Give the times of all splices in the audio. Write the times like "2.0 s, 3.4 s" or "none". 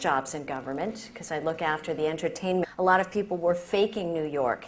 none